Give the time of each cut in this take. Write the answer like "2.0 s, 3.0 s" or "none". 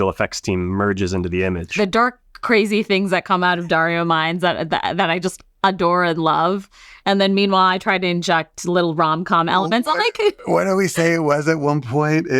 1.7 s